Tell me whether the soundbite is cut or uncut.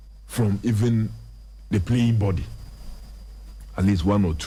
uncut